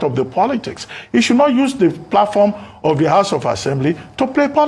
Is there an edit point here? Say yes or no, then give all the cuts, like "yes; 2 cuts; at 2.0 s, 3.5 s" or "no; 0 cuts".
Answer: no; 0 cuts